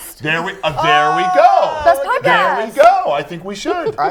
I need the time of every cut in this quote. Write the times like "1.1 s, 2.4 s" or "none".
none